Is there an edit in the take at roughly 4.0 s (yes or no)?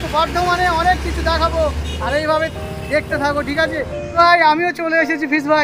yes